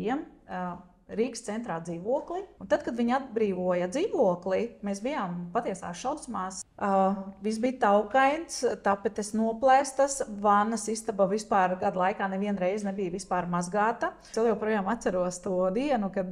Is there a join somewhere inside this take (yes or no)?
yes